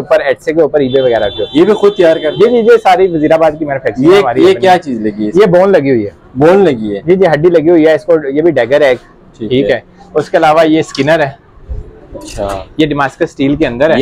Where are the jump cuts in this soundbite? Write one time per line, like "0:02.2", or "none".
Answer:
none